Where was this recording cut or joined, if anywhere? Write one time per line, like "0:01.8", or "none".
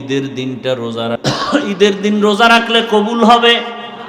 0:01.2